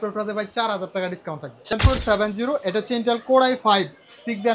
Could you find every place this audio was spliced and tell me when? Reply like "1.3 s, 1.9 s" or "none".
1.7 s